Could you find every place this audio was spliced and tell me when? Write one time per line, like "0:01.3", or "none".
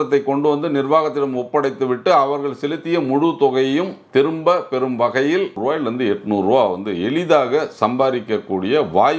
0:05.6